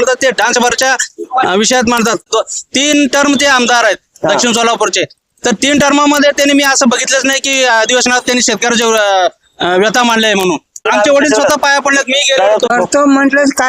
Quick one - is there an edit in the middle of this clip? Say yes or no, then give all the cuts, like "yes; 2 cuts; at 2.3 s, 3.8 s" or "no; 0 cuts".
yes; 3 cuts; at 2.3 s, 10.9 s, 12.7 s